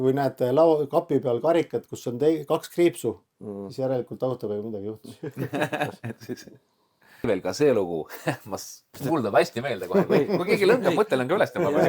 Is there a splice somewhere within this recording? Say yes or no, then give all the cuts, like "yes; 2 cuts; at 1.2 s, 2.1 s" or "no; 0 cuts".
yes; 1 cut; at 7.3 s